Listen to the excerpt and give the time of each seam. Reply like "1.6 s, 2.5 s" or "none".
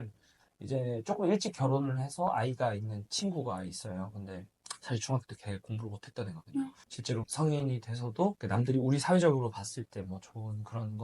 6.9 s